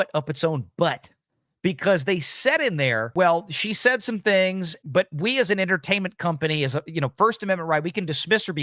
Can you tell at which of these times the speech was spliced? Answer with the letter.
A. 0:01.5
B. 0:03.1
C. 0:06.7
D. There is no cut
B